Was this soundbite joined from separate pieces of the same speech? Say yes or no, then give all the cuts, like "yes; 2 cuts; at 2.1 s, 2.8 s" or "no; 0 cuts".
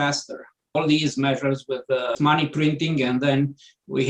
yes; 2 cuts; at 0.7 s, 2.2 s